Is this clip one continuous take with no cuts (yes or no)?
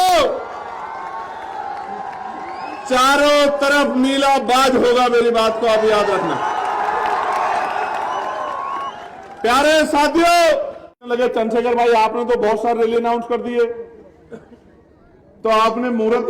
no